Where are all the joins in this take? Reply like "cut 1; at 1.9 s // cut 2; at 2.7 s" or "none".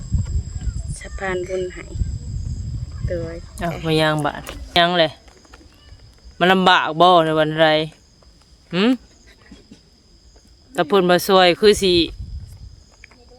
cut 1; at 4.8 s